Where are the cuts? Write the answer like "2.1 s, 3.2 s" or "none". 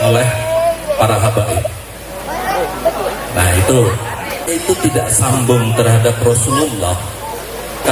4.5 s